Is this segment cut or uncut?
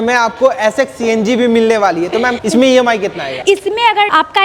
uncut